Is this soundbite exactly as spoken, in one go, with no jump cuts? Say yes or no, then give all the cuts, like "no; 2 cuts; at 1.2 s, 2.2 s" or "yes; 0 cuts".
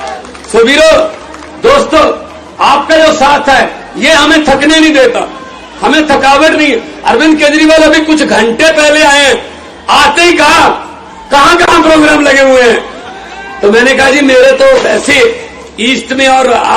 yes; 0 cuts